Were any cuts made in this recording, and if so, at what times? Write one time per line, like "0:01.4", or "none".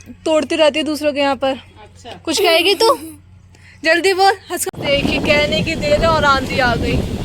0:04.6

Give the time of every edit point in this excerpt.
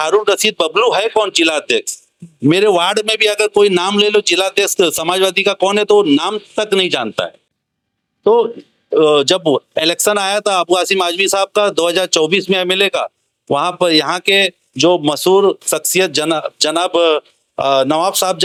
none

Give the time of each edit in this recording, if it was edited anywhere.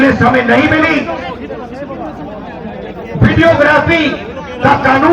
none

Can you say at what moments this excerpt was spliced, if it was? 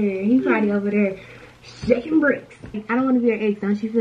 0:02.8

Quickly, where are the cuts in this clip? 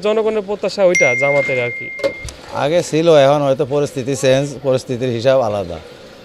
none

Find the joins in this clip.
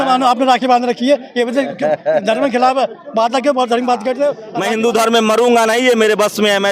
0:04.5

